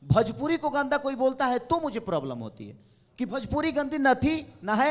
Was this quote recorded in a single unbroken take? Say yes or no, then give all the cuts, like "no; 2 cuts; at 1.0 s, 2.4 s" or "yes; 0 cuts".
yes; 0 cuts